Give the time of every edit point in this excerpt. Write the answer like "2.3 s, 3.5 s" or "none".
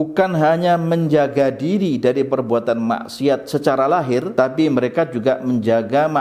4.3 s